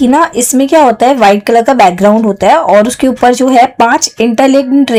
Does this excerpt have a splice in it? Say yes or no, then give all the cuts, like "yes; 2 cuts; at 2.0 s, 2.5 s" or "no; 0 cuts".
no; 0 cuts